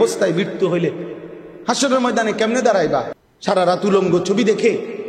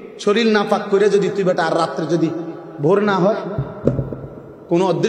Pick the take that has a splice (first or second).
first